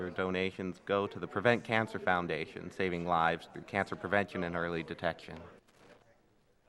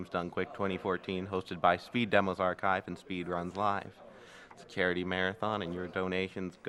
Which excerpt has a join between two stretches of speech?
first; 1 cut; at 2.2 s

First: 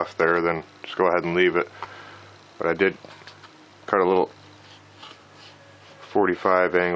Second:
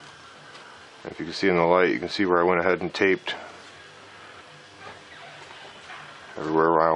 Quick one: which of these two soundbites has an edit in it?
second; 1 cut; at 3.2 s

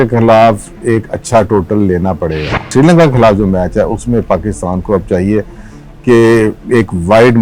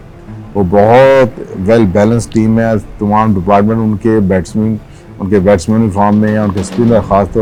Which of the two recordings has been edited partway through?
first; 1 cut; at 2.7 s

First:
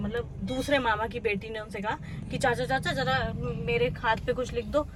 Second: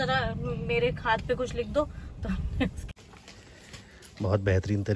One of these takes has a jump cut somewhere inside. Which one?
second; 1 cut; at 2.9 s

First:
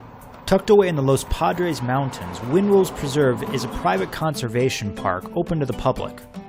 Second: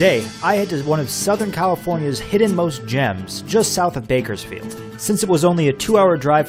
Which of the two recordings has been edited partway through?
first; 1 cut; at 3.7 s

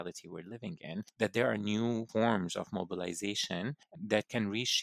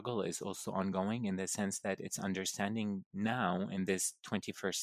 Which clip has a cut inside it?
first; 3 cuts; at 1.1 s, 2.1 s, 3.9 s

